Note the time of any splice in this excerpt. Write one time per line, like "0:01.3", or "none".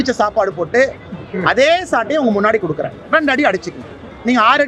none